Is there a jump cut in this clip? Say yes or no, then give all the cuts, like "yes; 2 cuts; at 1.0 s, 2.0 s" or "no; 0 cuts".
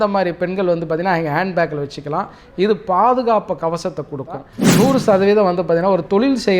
yes; 1 cut; at 4.6 s